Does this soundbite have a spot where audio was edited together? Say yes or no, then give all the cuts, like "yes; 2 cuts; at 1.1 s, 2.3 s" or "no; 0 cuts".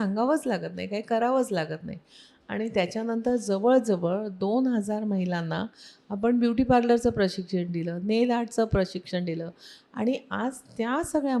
no; 0 cuts